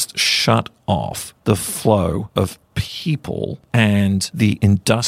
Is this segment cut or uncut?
cut